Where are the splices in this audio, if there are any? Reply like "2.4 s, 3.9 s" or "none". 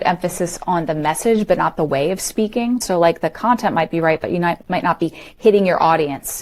2.8 s